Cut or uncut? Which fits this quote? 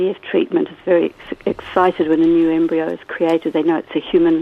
uncut